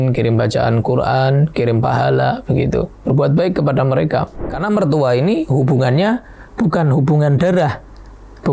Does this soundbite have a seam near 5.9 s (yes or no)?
no